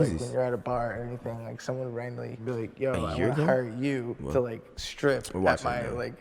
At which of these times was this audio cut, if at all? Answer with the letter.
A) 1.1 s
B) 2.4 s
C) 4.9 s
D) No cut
B